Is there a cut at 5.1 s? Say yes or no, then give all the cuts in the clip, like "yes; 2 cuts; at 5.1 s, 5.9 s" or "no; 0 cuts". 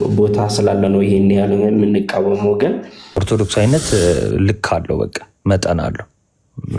no; 1 cut; at 3.2 s